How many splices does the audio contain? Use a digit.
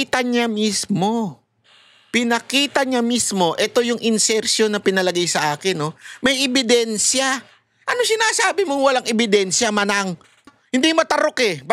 1